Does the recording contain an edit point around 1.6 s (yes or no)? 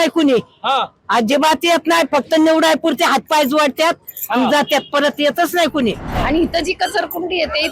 no